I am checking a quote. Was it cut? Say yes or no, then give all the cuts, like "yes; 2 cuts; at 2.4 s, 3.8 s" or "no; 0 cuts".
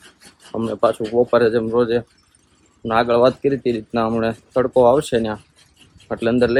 no; 0 cuts